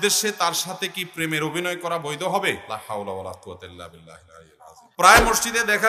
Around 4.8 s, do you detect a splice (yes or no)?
yes